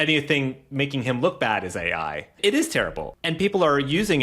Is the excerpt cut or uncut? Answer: cut